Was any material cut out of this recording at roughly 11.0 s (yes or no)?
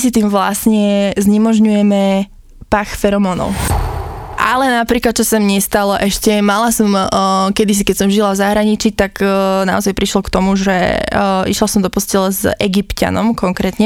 no